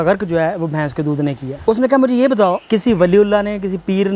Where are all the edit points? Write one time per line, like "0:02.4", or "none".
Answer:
0:01.5
0:02.6